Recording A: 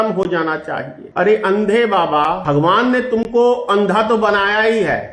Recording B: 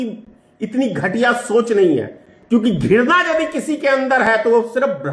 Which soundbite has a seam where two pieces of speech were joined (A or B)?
A